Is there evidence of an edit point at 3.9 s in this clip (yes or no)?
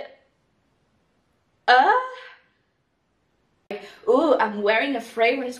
yes